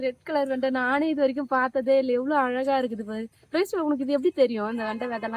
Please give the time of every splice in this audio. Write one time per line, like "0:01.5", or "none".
none